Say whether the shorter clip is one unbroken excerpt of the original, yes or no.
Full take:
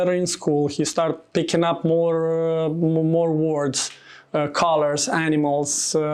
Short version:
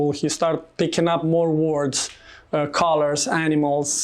no